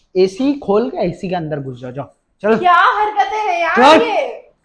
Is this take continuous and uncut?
yes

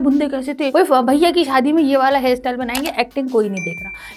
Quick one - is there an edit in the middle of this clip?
no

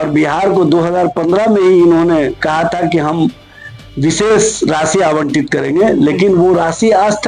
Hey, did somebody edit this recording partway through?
no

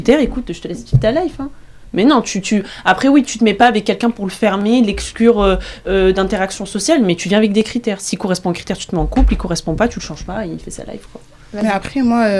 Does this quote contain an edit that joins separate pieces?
no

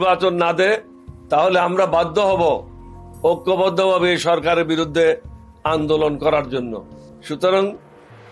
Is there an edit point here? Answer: no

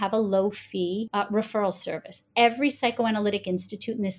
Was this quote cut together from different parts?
yes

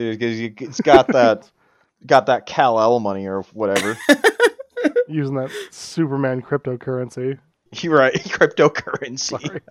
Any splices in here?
no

